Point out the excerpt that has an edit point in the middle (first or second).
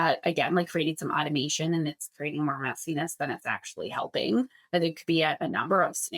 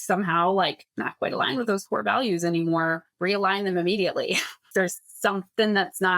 second